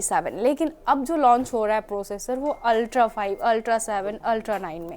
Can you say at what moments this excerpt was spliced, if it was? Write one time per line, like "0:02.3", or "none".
none